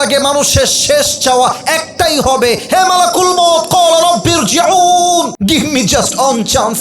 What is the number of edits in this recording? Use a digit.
1